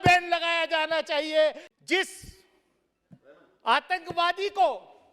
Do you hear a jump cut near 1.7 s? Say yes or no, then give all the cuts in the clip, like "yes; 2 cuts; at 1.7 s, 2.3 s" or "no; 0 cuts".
yes; 1 cut; at 1.7 s